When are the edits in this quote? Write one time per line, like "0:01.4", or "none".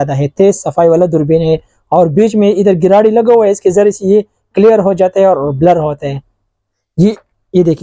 none